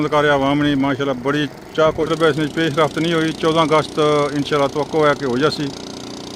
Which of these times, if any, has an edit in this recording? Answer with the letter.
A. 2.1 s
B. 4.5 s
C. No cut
A